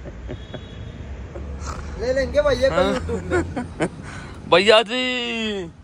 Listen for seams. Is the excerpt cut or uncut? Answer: uncut